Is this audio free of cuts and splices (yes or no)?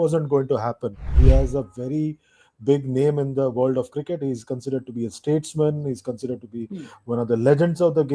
no